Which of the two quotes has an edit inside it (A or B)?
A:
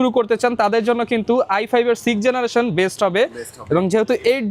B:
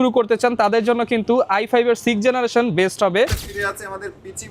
B